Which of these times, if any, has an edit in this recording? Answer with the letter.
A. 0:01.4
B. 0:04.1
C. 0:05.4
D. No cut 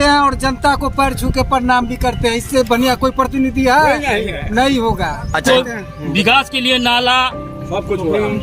C